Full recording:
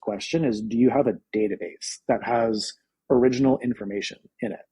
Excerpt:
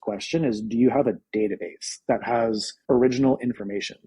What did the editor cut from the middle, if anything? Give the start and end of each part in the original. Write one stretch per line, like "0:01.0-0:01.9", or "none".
0:02.7-0:02.9